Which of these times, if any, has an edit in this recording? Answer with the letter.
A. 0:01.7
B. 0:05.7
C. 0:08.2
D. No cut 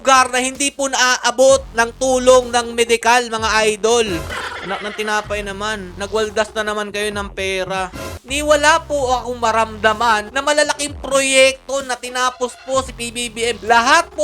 C